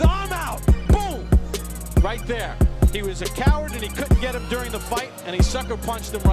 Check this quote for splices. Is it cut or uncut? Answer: cut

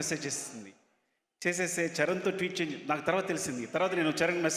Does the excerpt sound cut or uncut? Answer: uncut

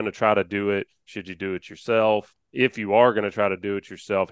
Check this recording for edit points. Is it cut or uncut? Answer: cut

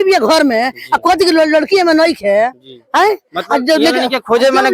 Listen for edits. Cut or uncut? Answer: uncut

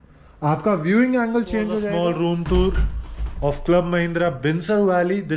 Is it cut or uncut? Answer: cut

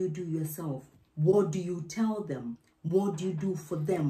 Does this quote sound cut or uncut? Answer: uncut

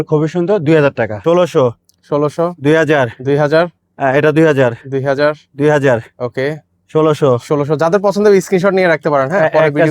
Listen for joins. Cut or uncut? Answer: cut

